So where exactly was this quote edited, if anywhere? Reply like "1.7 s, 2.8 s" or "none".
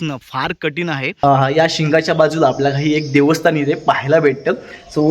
1.2 s